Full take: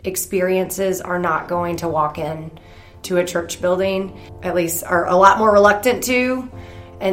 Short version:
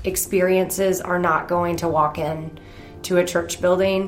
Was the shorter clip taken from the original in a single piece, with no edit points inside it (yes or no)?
yes